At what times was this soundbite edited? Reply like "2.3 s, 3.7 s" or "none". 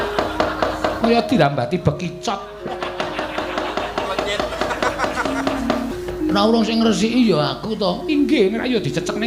5.9 s